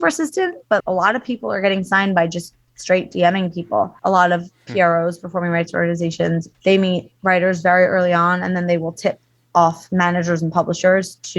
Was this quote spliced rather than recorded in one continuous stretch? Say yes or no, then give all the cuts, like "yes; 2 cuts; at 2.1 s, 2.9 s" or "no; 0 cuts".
yes; 3 cuts; at 0.8 s, 4.0 s, 6.5 s